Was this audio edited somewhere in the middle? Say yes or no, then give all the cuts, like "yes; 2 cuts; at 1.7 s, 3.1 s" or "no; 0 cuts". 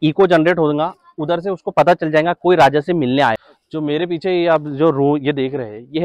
yes; 1 cut; at 3.5 s